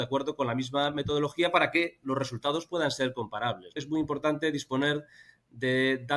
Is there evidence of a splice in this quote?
yes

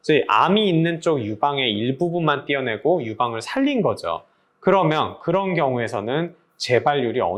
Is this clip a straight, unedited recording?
yes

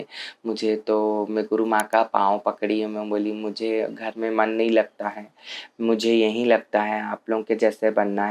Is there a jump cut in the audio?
no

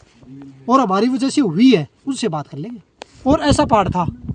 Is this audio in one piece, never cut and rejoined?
no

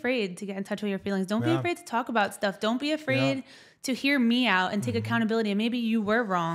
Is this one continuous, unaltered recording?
yes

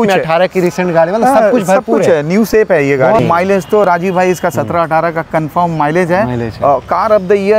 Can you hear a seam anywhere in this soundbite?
yes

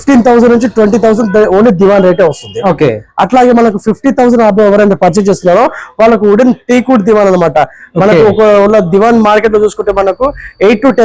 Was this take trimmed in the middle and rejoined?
no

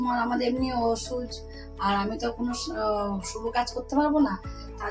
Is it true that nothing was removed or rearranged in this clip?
yes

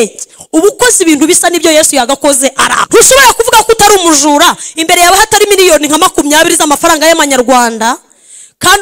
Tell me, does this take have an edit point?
yes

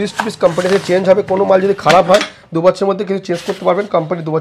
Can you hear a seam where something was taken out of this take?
no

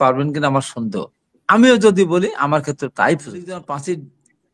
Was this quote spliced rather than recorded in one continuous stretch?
yes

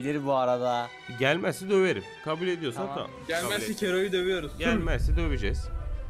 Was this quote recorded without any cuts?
no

